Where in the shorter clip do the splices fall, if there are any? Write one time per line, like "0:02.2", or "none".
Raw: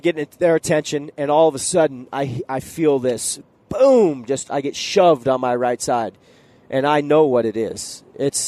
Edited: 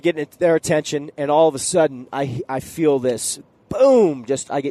none